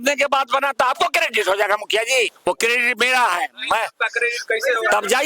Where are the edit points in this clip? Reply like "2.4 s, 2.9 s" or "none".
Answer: 2.3 s